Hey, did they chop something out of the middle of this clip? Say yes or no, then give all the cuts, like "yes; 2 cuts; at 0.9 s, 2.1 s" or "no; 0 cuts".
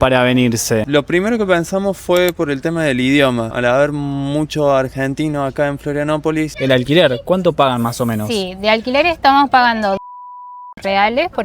yes; 3 cuts; at 0.9 s, 3.5 s, 6.5 s